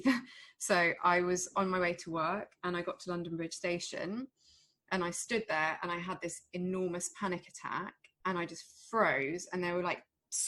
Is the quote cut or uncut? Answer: uncut